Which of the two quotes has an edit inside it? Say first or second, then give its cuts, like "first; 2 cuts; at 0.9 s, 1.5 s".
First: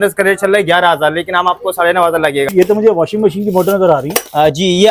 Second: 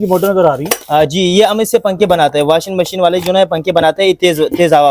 first; 1 cut; at 2.5 s